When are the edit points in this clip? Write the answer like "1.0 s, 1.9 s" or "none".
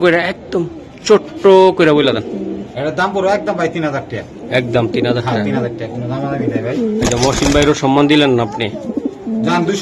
none